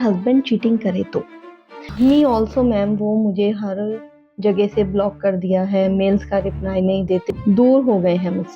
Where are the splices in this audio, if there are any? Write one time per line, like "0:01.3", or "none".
0:01.8
0:07.2